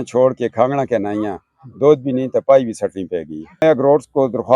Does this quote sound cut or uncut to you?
cut